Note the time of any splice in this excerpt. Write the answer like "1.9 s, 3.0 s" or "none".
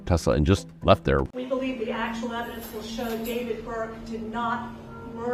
1.3 s